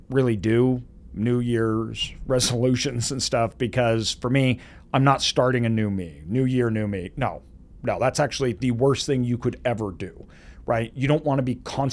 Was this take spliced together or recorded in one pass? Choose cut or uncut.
uncut